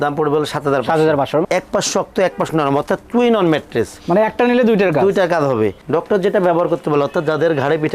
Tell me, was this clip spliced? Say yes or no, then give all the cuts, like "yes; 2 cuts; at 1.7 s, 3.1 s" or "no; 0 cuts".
yes; 2 cuts; at 1.4 s, 5.8 s